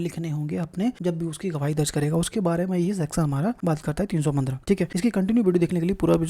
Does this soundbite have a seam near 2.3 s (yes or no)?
no